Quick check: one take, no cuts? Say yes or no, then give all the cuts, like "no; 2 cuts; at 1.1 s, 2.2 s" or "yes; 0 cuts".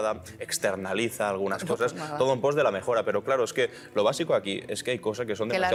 yes; 0 cuts